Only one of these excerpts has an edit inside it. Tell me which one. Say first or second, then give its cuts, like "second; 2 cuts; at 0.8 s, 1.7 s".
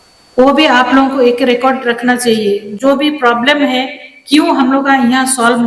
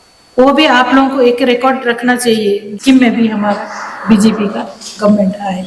second; 1 cut; at 2.7 s